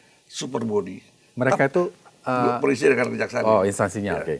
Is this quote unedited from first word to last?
yes; 0 cuts

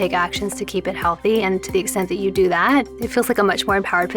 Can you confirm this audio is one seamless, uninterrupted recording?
no; 1 cut; at 3.0 s

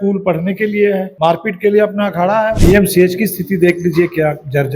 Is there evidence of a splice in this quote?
yes; 2 cuts; at 1.1 s, 2.6 s

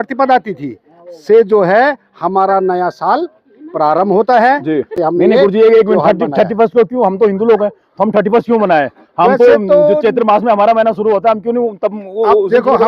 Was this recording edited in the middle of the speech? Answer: yes; 1 cut; at 4.9 s

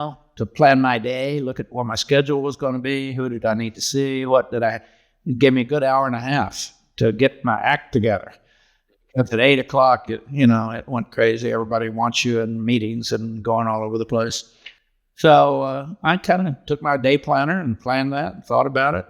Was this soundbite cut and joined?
yes; 1 cut; at 14.9 s

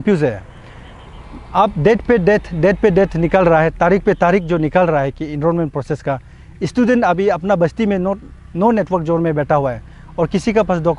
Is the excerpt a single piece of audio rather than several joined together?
yes; 0 cuts

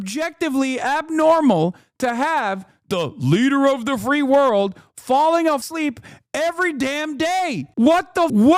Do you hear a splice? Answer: no; 0 cuts

